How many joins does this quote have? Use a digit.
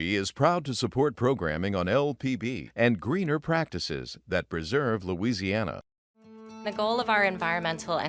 0